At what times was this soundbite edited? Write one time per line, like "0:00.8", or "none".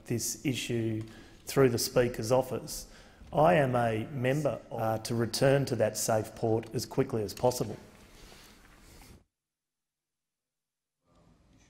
0:04.7

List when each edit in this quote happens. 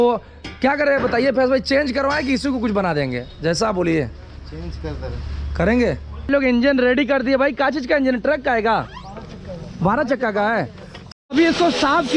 0:06.3
0:11.0

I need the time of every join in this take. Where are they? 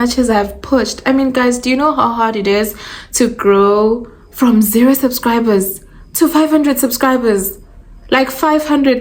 none

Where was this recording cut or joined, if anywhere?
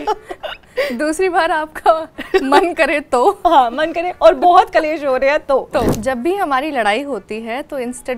0:05.9

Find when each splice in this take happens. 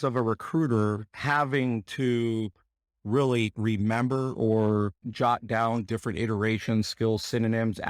none

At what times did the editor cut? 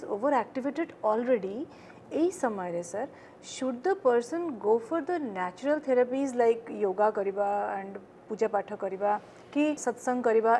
none

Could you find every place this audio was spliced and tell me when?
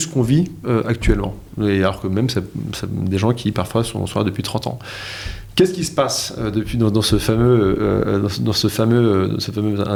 none

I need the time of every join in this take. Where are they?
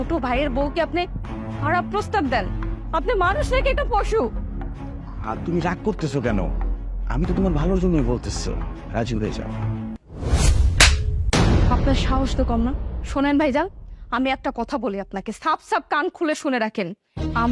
none

